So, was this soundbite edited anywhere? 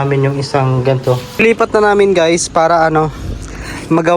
yes; 1 cut; at 1.3 s

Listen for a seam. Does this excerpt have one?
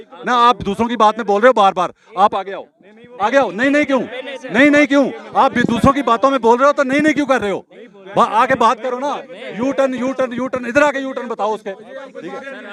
no; 0 cuts

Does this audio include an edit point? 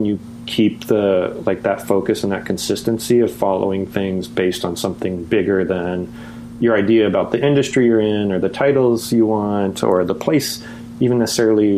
no; 0 cuts

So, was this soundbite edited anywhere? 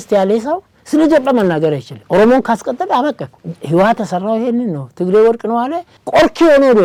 no; 0 cuts

